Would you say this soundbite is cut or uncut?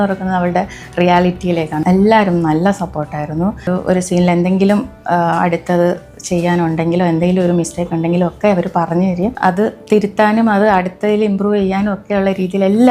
cut